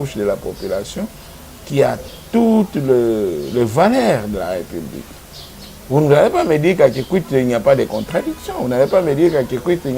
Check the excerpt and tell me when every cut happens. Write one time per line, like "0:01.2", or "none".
none